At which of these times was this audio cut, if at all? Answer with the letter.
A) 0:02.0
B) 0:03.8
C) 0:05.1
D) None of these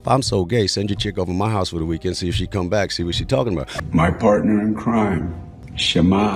B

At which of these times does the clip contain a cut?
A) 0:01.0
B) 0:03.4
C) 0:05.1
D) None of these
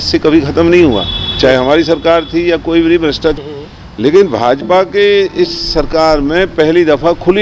B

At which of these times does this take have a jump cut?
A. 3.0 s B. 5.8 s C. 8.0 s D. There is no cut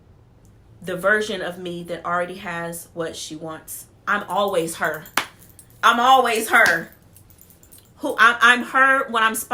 D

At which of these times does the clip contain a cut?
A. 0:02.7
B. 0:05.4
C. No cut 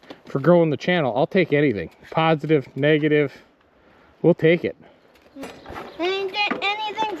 B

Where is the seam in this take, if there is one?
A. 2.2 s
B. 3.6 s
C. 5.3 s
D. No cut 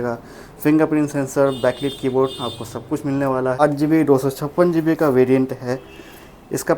B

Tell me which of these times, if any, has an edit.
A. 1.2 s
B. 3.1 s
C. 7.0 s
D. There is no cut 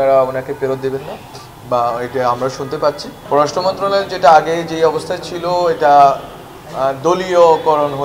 B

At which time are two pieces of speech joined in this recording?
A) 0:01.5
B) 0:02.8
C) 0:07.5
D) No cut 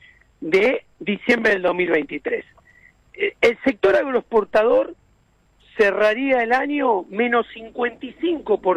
D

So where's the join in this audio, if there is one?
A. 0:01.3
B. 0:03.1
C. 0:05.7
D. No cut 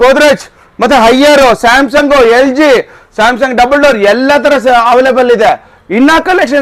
D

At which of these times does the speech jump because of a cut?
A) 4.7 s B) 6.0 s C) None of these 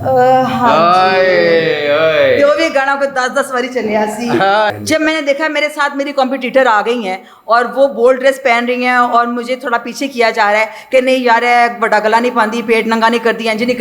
A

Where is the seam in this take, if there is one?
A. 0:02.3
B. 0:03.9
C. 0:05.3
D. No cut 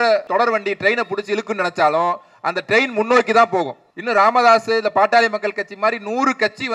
D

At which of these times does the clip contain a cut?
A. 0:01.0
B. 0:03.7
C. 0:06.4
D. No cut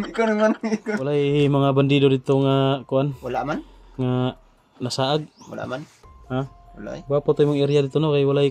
A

